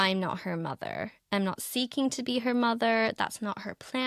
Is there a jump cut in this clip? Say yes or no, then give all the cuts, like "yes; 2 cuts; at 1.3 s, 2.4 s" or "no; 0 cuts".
no; 0 cuts